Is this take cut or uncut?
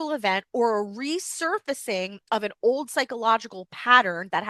uncut